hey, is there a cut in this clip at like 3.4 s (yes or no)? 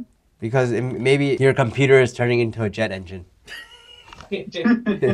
no